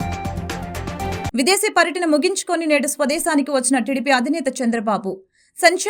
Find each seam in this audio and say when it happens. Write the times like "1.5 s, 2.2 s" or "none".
0.9 s